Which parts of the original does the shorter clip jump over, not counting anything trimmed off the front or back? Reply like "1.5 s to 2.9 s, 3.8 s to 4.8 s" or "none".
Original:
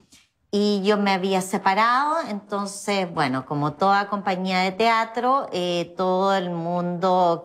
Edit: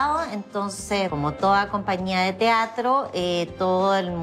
3.1 s to 3.5 s